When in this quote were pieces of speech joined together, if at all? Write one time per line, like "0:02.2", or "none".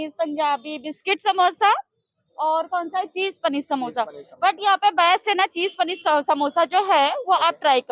none